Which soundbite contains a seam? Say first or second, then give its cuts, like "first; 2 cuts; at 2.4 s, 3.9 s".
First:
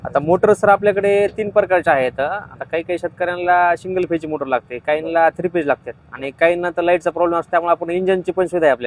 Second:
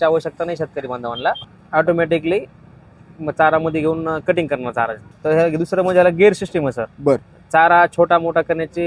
second; 2 cuts; at 1.4 s, 5.1 s